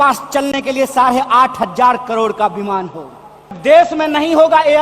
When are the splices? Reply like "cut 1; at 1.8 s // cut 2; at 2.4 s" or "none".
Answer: cut 1; at 3.6 s